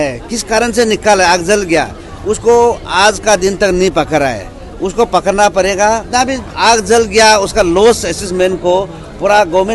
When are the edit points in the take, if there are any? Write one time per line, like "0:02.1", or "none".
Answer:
0:06.0

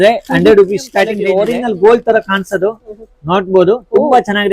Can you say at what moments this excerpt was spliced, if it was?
0:01.2

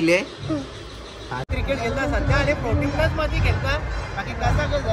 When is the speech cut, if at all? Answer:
0:01.5

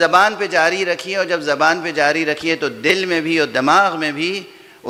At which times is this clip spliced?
none

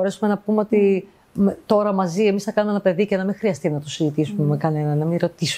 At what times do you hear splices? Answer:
none

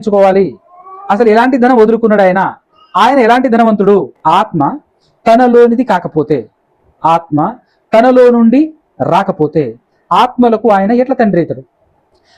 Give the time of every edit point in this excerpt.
0:04.1

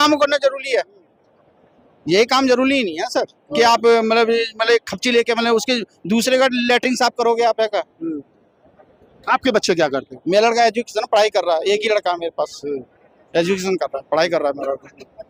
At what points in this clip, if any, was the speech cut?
none

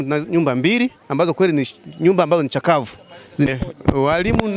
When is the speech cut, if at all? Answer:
0:03.5

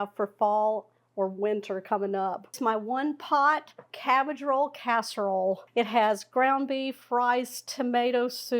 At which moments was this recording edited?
0:02.6
0:05.6

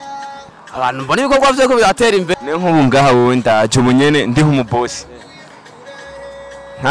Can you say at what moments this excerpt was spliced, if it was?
0:02.3

